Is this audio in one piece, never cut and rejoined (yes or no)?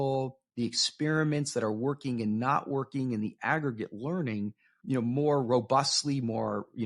no